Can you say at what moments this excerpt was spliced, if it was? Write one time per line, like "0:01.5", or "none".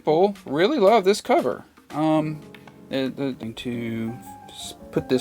0:03.4